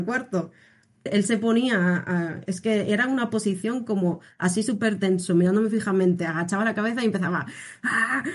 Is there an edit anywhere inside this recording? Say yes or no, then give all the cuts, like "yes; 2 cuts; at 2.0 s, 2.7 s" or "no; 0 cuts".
yes; 1 cut; at 1.0 s